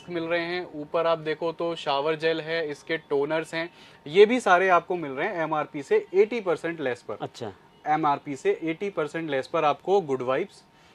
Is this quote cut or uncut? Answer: uncut